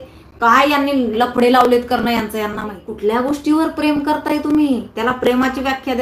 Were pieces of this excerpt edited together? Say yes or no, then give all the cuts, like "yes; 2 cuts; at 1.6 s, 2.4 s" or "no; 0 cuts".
yes; 1 cut; at 2.9 s